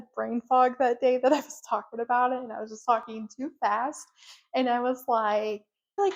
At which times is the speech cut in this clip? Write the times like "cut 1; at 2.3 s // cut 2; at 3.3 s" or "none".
none